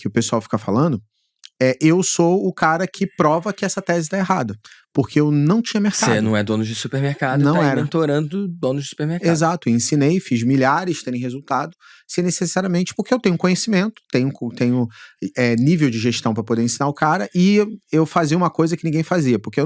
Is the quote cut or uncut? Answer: uncut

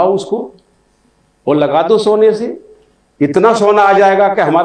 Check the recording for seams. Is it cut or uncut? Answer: uncut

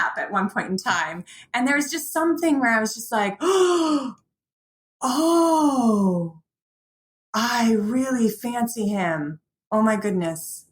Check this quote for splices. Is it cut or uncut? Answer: cut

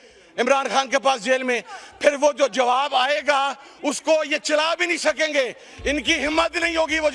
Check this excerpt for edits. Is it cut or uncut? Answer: uncut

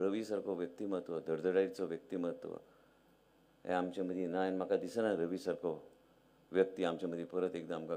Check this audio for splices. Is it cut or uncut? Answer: uncut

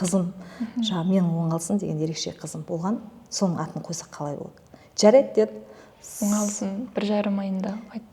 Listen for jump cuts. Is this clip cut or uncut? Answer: uncut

